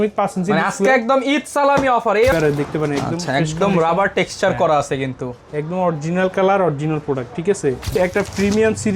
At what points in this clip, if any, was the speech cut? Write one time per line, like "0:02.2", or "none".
0:02.3
0:07.9